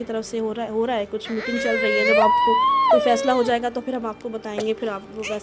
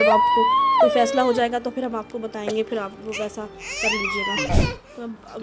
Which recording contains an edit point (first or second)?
second